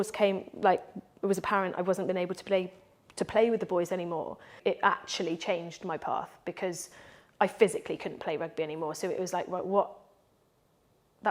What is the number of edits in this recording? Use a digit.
1